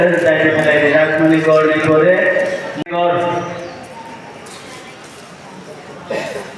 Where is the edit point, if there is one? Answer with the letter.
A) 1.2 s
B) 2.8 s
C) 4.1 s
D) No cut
B